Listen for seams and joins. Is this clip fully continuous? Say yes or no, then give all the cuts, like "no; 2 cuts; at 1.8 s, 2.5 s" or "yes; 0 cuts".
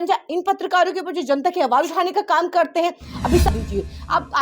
no; 1 cut; at 3.5 s